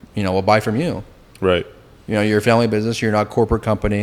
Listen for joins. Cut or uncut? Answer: uncut